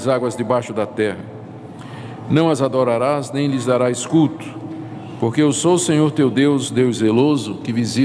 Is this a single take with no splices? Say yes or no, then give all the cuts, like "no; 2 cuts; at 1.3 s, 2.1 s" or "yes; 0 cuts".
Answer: no; 1 cut; at 0.9 s